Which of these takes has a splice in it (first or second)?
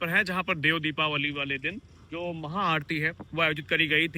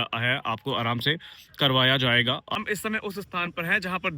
second